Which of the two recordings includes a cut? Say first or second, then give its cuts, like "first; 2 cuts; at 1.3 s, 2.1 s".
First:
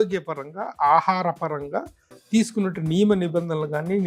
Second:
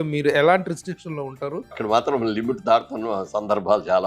second; 1 cut; at 1.8 s